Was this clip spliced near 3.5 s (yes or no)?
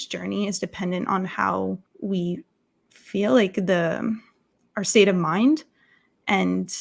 no